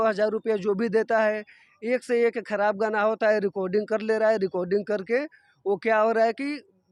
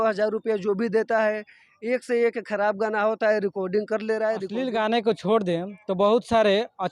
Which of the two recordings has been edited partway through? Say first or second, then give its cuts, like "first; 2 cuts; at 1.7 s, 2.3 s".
second; 1 cut; at 4.5 s